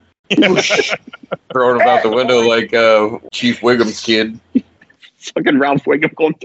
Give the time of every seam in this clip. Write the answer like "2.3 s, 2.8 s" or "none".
3.3 s